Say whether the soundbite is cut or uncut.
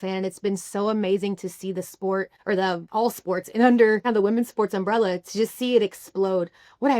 cut